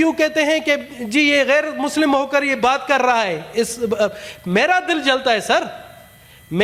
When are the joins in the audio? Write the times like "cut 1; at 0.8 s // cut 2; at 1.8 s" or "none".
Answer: none